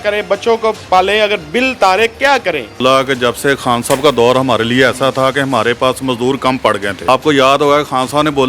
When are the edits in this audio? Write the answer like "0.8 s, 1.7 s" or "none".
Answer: 2.8 s, 7.0 s